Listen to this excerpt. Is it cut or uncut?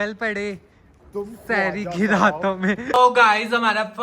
cut